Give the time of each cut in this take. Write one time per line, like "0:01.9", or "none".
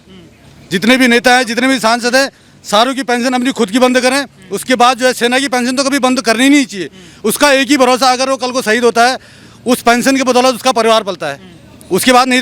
none